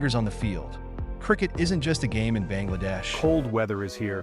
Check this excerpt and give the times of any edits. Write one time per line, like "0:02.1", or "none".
0:03.1